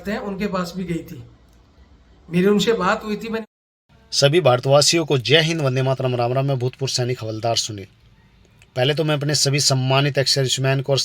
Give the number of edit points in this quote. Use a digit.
1